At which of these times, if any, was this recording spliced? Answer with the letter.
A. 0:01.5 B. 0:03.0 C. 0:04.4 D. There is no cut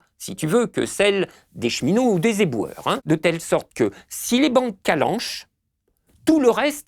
B